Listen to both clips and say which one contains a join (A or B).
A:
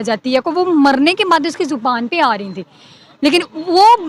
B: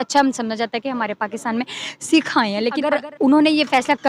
B